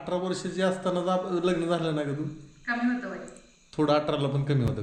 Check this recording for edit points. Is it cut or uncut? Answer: uncut